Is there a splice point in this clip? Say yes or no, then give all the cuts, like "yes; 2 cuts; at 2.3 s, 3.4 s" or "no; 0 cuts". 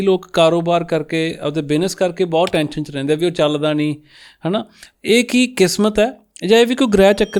no; 0 cuts